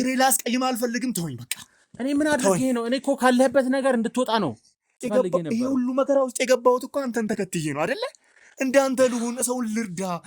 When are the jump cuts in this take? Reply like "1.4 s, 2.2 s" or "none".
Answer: 5.0 s